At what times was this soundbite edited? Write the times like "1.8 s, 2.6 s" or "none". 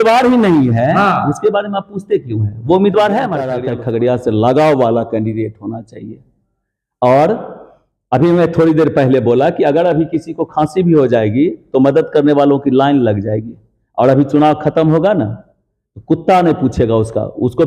3.6 s

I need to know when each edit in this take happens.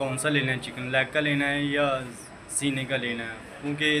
none

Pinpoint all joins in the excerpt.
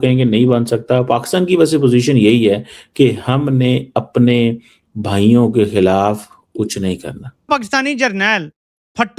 7.5 s

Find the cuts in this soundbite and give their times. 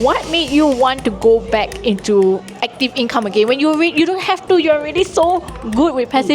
none

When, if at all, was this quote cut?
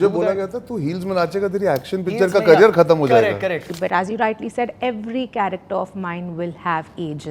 3.7 s

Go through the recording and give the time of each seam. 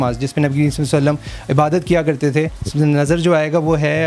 2.6 s

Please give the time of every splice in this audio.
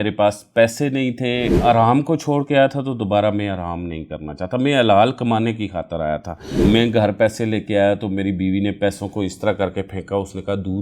1.5 s, 6.6 s

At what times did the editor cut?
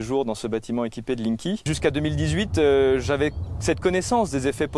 1.7 s

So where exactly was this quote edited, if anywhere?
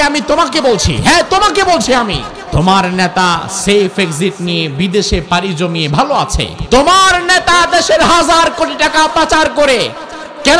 2.3 s, 6.5 s

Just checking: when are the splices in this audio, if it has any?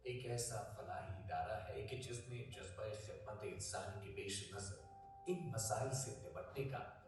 none

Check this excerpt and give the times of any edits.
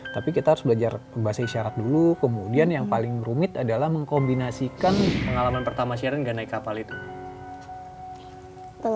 5.1 s

